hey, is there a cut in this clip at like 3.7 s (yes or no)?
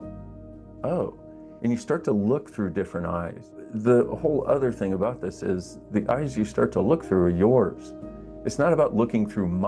yes